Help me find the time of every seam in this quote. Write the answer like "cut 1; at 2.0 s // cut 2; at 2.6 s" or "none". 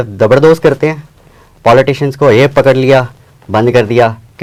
none